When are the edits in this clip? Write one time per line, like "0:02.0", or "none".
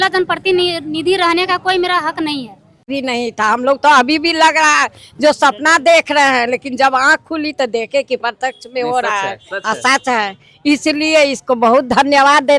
0:02.9